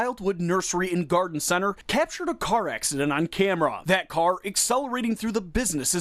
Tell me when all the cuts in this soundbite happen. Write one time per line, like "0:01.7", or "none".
0:03.8